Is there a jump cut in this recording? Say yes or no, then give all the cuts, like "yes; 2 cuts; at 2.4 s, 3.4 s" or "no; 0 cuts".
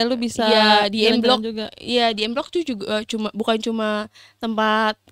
no; 0 cuts